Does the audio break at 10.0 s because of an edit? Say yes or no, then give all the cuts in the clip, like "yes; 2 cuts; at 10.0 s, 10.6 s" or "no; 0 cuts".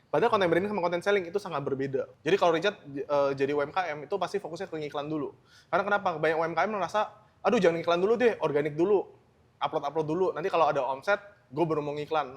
no; 1 cut; at 2.1 s